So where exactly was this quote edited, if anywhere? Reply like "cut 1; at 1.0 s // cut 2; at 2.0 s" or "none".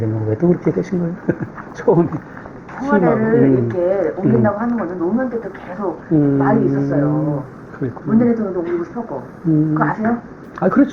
none